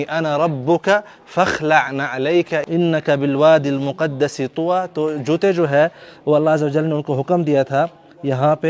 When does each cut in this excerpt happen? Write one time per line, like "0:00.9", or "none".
0:02.6